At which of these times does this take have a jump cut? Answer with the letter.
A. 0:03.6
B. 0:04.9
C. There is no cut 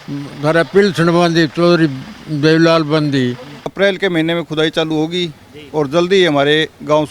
A